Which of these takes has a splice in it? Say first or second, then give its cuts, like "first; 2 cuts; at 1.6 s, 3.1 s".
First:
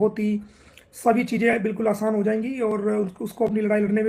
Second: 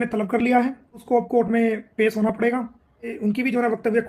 second; 2 cuts; at 1.0 s, 3.1 s